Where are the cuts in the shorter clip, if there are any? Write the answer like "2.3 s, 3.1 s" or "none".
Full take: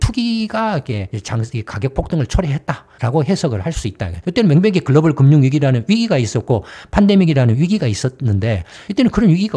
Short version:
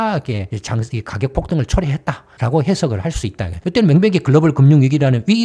none

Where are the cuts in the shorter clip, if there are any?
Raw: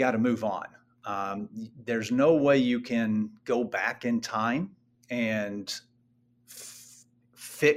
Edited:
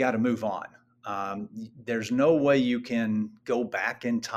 none

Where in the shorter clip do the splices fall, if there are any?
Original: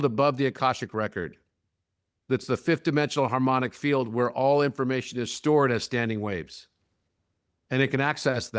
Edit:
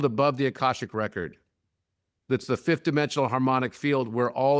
none

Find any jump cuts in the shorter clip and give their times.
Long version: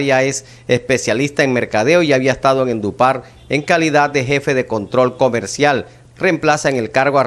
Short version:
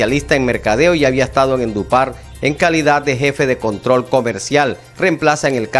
4.8 s

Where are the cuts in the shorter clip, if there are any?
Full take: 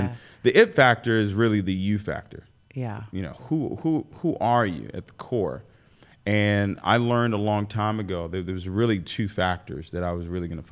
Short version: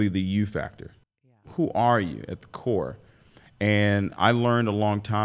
1.4 s

